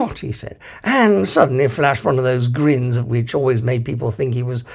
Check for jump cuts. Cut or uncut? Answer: uncut